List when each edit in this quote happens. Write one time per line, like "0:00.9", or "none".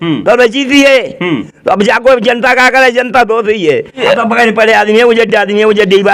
0:04.0

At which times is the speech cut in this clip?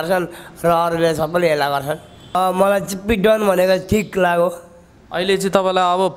0:02.4

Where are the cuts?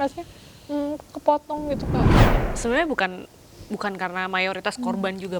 0:02.3

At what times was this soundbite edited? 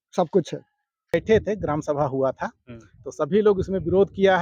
0:01.1

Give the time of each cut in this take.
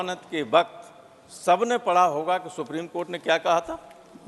none

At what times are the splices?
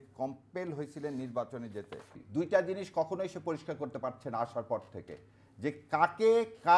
0:02.2

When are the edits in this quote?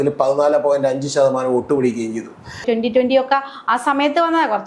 0:02.6

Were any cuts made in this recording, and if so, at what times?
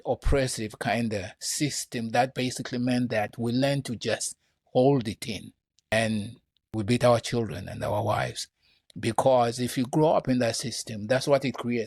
0:05.9
0:06.7

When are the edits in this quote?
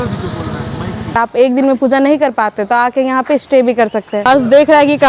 0:01.2
0:04.1

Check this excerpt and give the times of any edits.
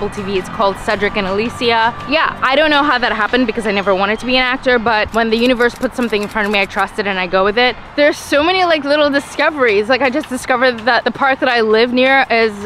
0:02.0
0:05.1
0:07.8

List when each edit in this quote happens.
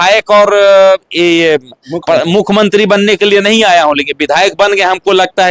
none

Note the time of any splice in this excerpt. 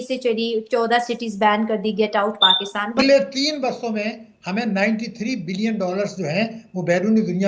0:03.0

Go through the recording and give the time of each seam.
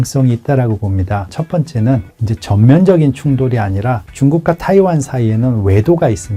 0:01.4

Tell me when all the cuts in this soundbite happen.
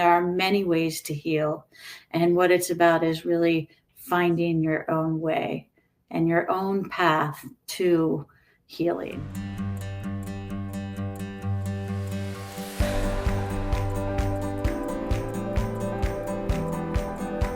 0:09.2

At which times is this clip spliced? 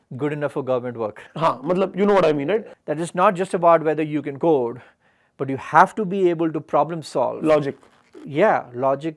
0:02.8

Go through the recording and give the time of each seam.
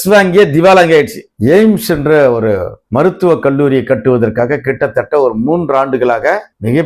0:01.3

